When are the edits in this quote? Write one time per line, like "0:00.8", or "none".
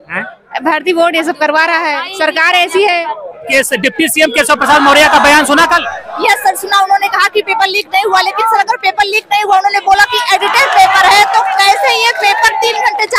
0:03.4